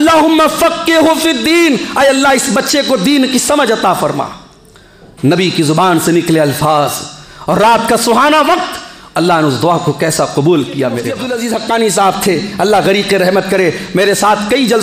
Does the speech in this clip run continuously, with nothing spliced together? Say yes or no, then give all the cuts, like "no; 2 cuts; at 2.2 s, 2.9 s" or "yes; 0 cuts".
no; 1 cut; at 11.3 s